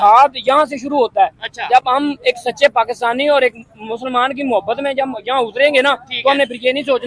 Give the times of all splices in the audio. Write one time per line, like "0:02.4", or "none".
0:05.8

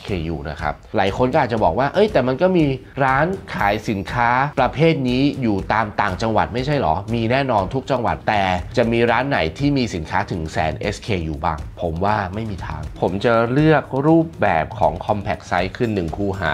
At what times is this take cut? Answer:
0:00.8
0:11.7
0:13.0

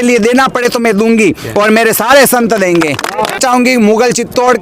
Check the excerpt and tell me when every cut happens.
0:03.4

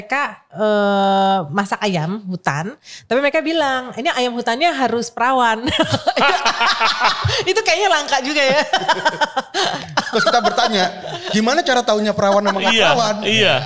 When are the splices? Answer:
none

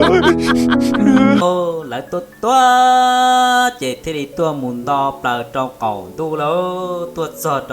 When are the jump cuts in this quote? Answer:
0:01.4

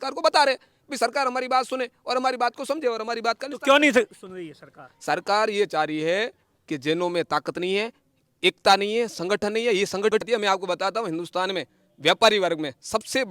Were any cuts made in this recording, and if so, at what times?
0:10.1

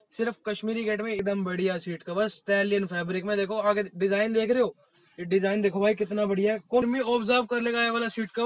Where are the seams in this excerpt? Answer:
0:01.2
0:06.8

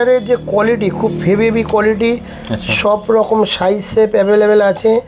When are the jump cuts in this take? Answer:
none

